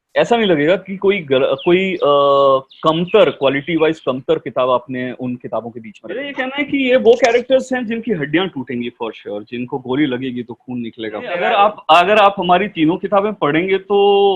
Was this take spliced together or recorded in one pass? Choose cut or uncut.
cut